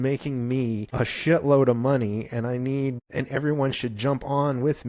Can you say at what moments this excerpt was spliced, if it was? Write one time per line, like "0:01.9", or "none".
0:00.9
0:03.0